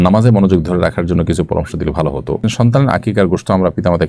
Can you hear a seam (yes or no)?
yes